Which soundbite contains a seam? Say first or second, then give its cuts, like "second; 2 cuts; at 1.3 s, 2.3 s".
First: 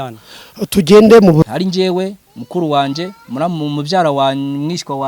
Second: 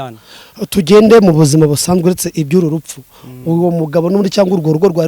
first; 1 cut; at 1.4 s